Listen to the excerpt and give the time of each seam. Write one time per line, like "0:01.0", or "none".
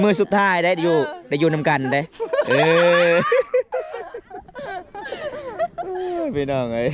none